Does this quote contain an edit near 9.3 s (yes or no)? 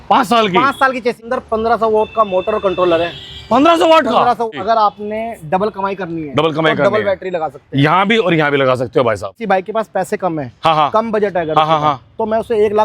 yes